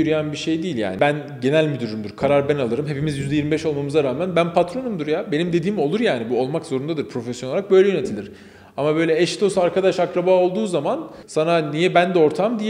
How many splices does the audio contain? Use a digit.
2